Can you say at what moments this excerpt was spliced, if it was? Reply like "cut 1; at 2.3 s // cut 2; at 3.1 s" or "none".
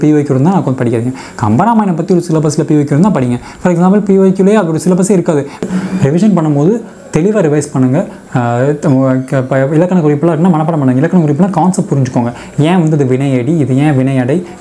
cut 1; at 5.6 s